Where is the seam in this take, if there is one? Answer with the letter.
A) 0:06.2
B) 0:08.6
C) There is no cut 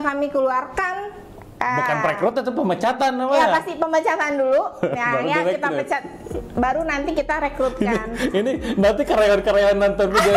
C